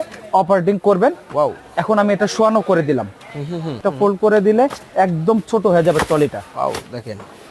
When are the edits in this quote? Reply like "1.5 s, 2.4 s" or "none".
3.8 s